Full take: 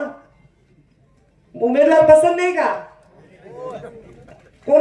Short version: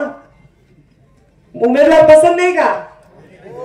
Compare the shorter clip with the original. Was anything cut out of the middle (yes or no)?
no